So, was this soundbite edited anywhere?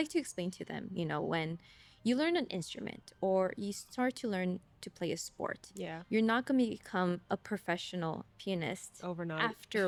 no; 0 cuts

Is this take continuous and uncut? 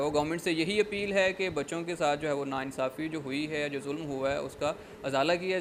yes; 0 cuts

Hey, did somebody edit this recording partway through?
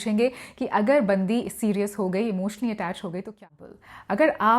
yes; 1 cut; at 3.4 s

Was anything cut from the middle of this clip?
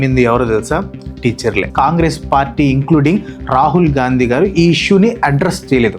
yes; 1 cut; at 1.7 s

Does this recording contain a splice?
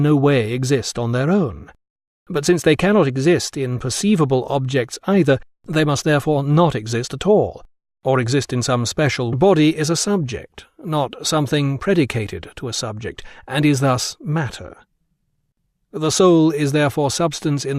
no; 0 cuts

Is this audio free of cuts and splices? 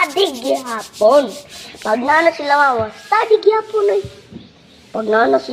yes; 0 cuts

